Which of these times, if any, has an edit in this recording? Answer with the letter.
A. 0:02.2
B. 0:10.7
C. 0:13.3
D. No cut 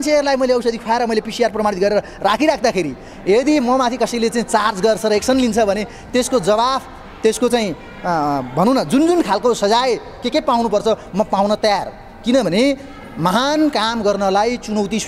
D